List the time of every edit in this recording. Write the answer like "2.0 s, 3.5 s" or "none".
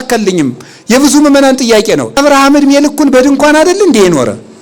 2.2 s